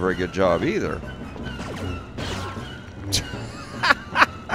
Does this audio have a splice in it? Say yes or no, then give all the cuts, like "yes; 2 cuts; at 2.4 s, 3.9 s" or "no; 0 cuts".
no; 0 cuts